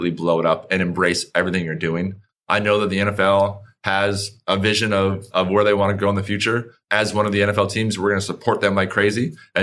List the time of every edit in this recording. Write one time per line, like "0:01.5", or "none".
0:02.3